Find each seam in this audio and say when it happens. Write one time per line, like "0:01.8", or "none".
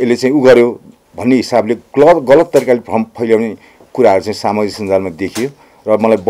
none